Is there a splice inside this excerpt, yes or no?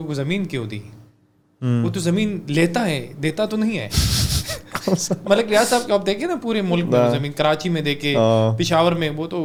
no